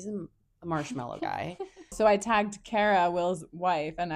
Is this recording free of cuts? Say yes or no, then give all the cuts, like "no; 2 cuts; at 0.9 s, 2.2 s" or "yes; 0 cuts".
no; 1 cut; at 1.9 s